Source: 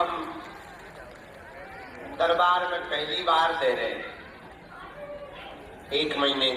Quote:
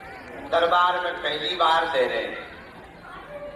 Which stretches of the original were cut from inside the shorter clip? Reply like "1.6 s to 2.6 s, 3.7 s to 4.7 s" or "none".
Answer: none